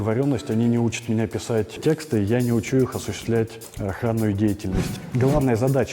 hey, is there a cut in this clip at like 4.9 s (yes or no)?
yes